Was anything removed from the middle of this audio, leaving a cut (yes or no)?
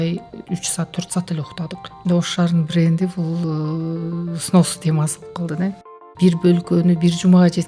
yes